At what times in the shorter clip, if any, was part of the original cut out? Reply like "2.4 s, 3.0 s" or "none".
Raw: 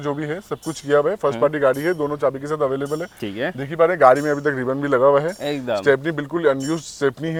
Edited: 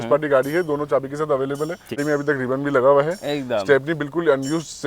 2.0 s